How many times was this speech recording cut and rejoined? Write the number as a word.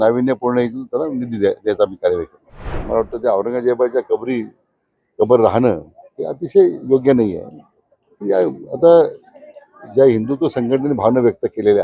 one